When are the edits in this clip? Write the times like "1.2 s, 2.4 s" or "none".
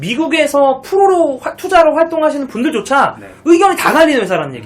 none